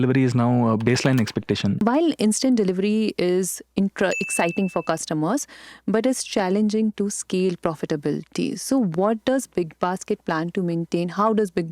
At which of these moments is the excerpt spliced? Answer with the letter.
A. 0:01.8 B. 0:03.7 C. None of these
A